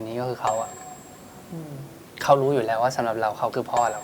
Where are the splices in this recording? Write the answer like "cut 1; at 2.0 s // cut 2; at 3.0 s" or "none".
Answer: cut 1; at 2.1 s